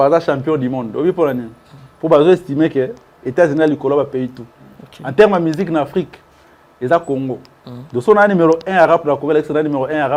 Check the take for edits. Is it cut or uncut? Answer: uncut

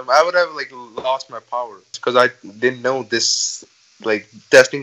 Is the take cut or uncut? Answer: cut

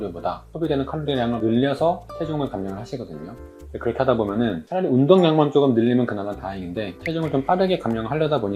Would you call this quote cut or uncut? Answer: uncut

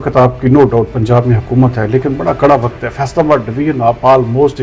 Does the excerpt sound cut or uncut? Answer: uncut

